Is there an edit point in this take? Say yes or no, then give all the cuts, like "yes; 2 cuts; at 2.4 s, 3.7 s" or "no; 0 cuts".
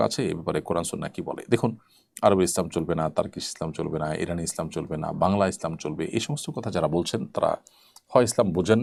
no; 0 cuts